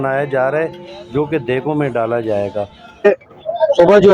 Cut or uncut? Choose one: cut